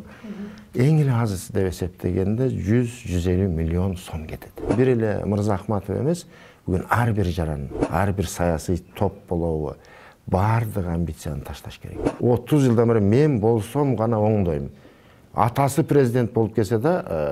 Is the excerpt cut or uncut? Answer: cut